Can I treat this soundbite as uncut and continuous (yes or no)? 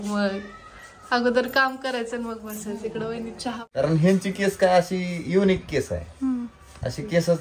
no